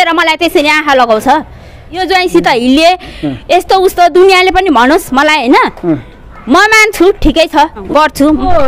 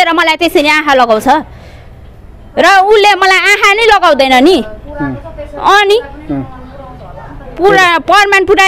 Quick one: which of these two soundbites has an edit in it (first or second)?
first